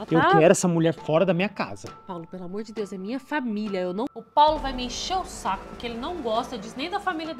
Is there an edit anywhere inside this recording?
yes; 1 cut; at 4.1 s

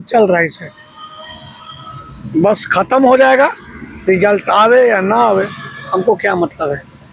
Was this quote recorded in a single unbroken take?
yes; 0 cuts

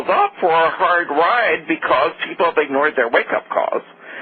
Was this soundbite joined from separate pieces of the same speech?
no; 0 cuts

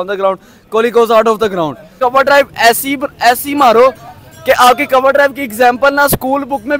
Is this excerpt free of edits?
no; 1 cut; at 2.0 s

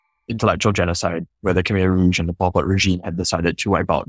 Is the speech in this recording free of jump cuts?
yes; 0 cuts

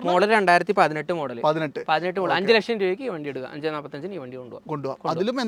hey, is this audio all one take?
yes; 0 cuts

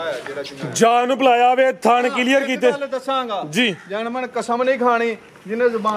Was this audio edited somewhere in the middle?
no; 0 cuts

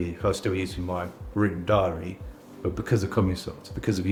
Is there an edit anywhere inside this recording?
no; 0 cuts

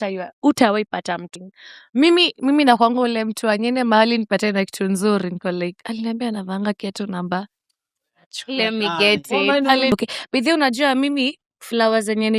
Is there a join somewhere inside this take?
yes; 2 cuts; at 1.3 s, 9.9 s

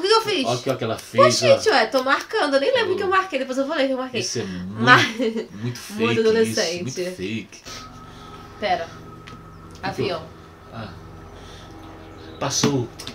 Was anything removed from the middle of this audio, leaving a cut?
yes; 1 cut; at 7.5 s

